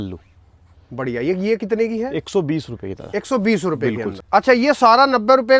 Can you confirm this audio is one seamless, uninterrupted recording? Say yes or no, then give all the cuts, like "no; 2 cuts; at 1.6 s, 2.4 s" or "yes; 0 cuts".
no; 1 cut; at 4.1 s